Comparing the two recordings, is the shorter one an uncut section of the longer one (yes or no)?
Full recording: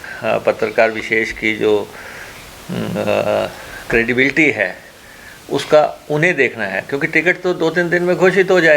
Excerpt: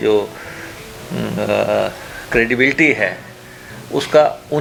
yes